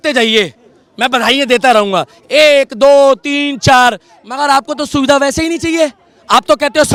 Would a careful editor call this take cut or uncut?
uncut